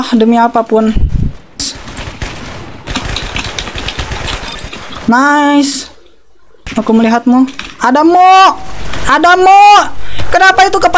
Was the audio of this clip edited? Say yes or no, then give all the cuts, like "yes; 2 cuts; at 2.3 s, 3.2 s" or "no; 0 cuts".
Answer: yes; 1 cut; at 1.2 s